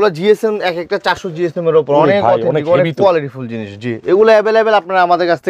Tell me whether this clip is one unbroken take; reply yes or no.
yes